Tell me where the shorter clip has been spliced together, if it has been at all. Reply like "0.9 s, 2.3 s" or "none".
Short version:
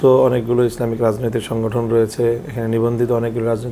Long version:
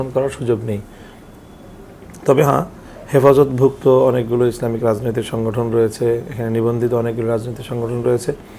none